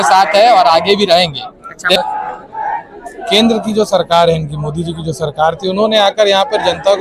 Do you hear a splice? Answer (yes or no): yes